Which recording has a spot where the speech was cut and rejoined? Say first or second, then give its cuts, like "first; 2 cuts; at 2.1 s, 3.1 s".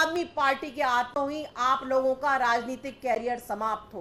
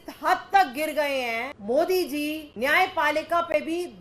second; 2 cuts; at 1.5 s, 2.4 s